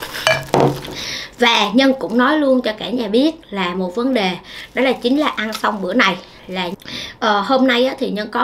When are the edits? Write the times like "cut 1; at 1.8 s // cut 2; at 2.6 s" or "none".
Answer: cut 1; at 0.9 s // cut 2; at 6.7 s